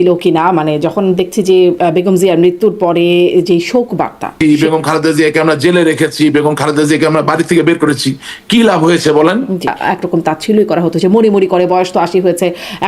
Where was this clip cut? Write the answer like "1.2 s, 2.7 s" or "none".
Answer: 4.3 s, 9.8 s